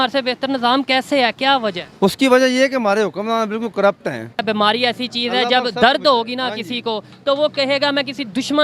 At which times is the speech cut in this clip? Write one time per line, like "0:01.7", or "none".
0:04.4